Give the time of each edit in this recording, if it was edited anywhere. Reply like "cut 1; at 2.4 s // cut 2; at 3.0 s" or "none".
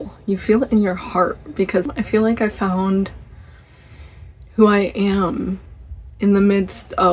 cut 1; at 1.9 s